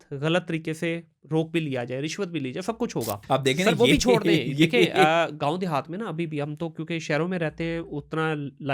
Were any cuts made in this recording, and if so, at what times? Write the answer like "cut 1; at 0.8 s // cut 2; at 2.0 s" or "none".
cut 1; at 3.2 s